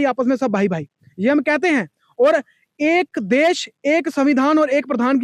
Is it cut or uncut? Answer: uncut